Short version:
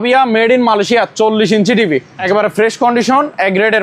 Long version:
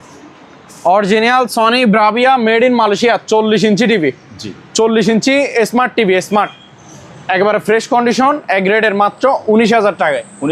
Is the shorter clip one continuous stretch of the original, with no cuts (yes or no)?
no